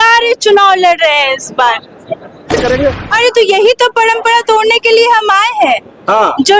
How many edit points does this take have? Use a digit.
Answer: 1